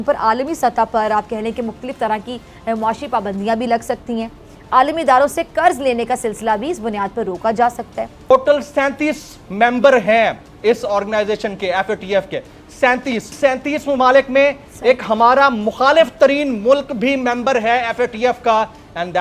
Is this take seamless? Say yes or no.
no